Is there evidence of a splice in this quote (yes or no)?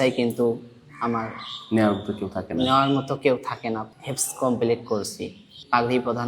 yes